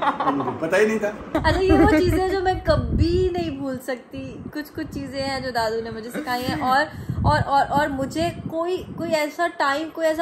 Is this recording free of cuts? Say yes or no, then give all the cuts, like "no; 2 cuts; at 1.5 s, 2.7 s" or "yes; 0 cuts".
no; 1 cut; at 1.4 s